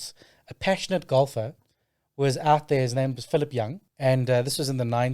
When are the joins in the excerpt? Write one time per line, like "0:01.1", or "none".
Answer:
0:03.8